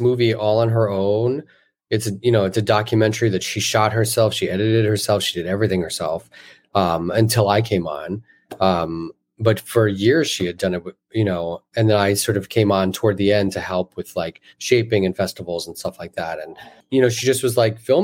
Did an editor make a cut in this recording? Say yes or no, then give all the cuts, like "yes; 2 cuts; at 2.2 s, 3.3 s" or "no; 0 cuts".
yes; 1 cut; at 16.7 s